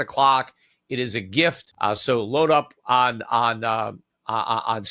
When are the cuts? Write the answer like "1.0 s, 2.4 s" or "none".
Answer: 1.7 s